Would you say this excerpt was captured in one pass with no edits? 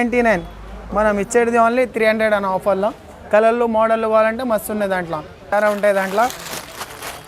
no; 1 cut; at 5.5 s

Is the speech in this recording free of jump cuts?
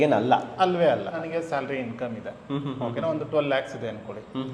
no; 1 cut; at 1.1 s

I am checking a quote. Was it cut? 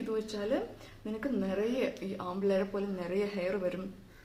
no; 0 cuts

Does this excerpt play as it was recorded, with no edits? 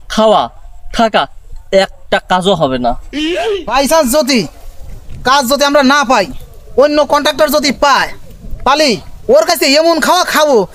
no; 1 cut; at 3.7 s

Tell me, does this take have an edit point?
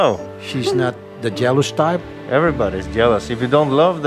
no; 0 cuts

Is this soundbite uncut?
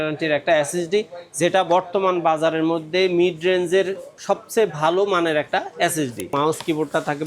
no; 1 cut; at 6.3 s

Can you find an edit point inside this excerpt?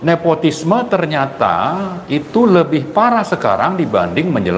no; 0 cuts

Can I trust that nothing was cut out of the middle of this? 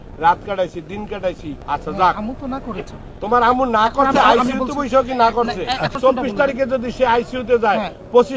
no; 2 cuts; at 1.5 s, 6.0 s

